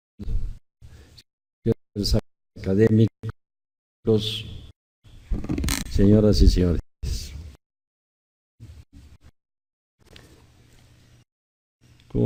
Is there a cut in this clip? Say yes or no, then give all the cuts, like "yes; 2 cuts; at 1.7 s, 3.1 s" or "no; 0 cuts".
no; 0 cuts